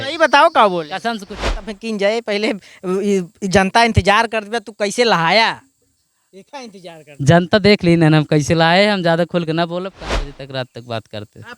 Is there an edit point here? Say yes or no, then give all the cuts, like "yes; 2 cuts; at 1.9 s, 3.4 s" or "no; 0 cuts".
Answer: yes; 2 cuts; at 1.5 s, 10.0 s